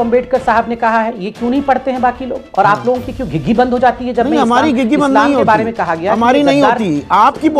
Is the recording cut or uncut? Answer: uncut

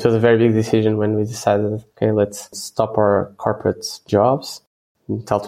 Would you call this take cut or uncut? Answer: uncut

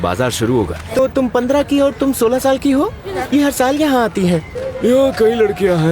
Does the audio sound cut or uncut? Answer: cut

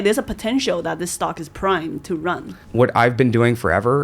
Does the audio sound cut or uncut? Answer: cut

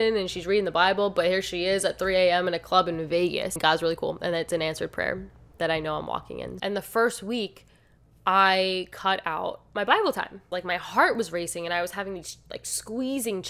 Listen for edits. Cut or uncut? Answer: cut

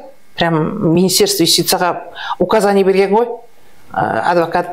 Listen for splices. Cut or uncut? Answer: uncut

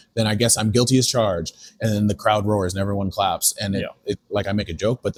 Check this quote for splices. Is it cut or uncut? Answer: uncut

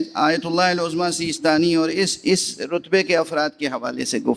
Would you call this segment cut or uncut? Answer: uncut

